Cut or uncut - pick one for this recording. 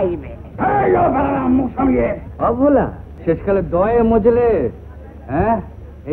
cut